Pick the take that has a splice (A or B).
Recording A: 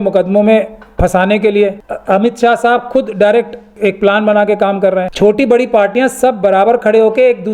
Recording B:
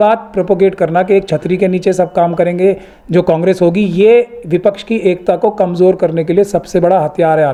A